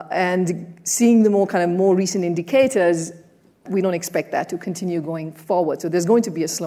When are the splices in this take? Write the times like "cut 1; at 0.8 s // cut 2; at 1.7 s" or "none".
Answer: cut 1; at 3.6 s